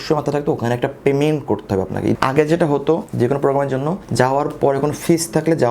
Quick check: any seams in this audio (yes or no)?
yes